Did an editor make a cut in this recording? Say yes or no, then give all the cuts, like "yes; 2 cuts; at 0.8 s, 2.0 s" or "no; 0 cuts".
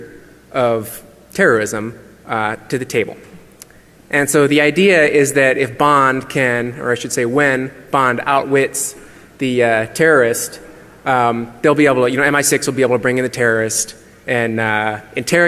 no; 0 cuts